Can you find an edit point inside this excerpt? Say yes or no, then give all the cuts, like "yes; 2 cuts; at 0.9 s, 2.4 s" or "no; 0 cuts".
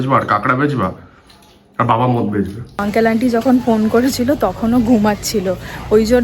yes; 1 cut; at 2.8 s